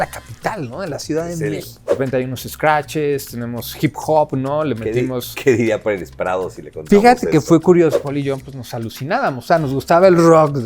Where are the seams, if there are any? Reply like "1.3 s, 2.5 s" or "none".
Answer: 1.9 s, 7.9 s